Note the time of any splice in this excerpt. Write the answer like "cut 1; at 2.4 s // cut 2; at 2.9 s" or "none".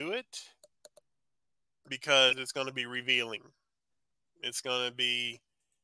cut 1; at 4.4 s